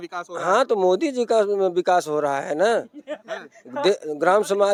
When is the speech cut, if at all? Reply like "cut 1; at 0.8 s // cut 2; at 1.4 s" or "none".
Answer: none